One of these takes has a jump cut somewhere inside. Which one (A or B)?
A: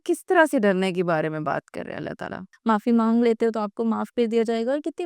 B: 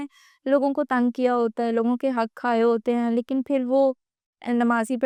A